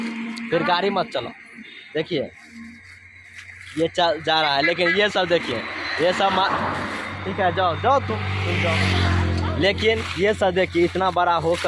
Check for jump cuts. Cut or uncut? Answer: uncut